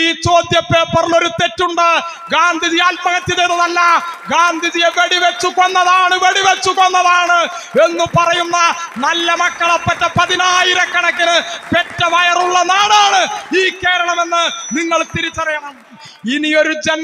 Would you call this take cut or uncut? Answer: cut